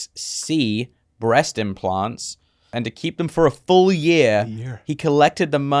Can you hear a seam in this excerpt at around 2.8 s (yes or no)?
yes